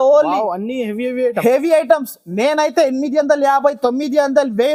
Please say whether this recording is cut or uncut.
uncut